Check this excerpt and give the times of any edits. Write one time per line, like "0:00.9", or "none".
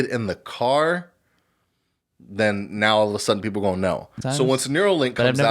0:04.2